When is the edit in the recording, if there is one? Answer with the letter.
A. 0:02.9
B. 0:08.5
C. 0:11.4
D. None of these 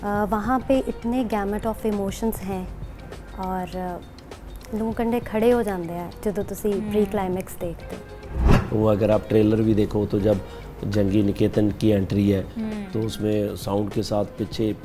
B